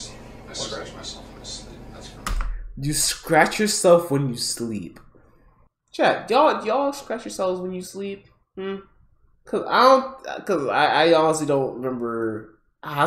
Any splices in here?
yes; 1 cut; at 1.8 s

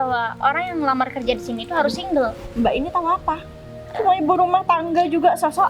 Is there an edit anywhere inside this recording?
no; 0 cuts

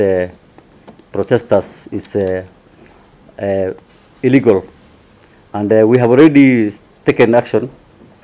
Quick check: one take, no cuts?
yes; 0 cuts

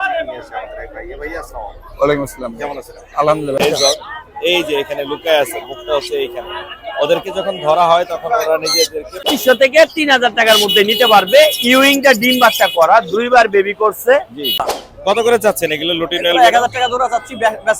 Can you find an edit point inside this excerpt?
yes; 3 cuts; at 3.6 s, 9.3 s, 14.7 s

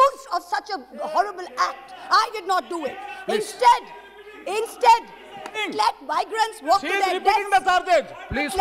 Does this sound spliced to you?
no; 0 cuts

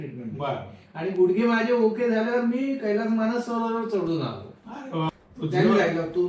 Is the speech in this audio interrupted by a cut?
yes; 1 cut; at 5.1 s

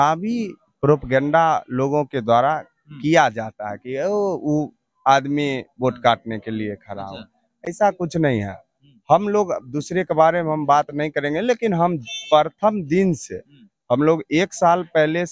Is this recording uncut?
yes; 0 cuts

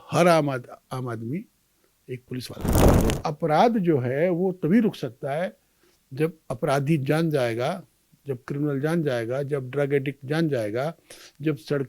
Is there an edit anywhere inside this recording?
yes; 1 cut; at 2.8 s

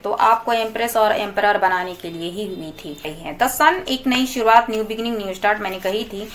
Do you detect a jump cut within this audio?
yes; 1 cut; at 3.2 s

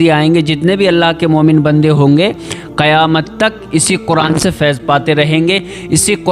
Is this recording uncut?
yes; 0 cuts

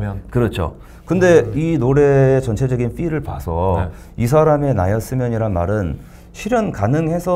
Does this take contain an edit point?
no; 0 cuts

